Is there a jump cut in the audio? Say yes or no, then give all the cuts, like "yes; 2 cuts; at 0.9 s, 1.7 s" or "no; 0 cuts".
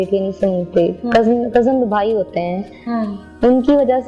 no; 0 cuts